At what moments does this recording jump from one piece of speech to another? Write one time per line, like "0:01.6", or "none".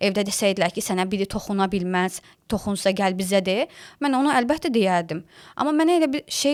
none